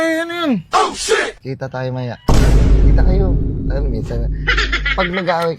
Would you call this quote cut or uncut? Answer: uncut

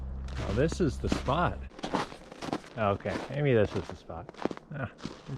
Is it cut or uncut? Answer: cut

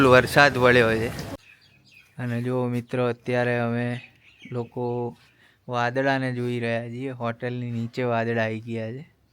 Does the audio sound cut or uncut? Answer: cut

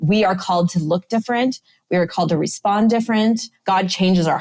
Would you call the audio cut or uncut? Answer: cut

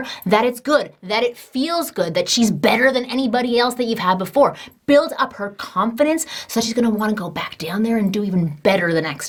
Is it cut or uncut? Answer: uncut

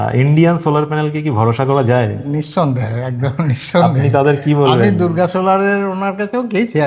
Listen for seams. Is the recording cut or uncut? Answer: uncut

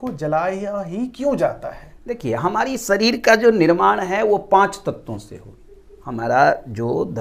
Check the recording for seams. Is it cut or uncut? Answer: uncut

